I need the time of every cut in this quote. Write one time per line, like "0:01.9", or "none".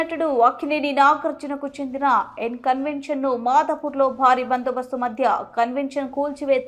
none

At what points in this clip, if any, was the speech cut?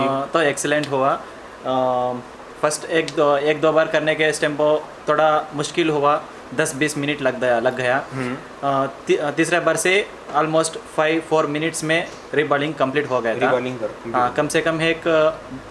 none

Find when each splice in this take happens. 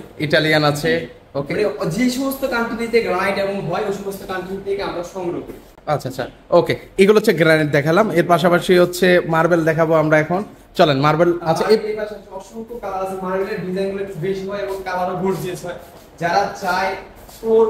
none

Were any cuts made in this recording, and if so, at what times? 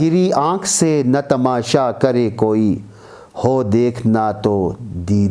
none

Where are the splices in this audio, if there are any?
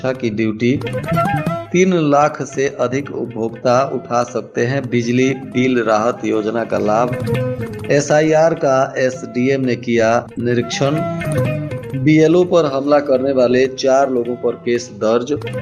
none

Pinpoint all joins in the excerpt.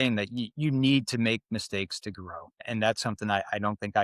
0:02.6

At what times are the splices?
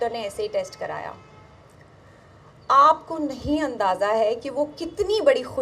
none

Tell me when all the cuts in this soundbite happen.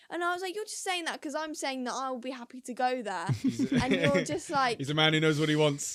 none

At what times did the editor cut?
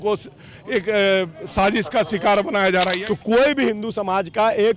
0:03.0

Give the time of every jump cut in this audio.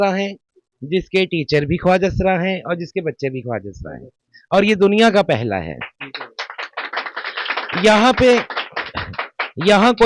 none

